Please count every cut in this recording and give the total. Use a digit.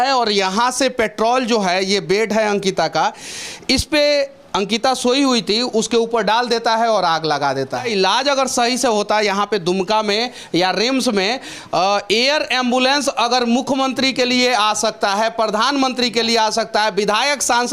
1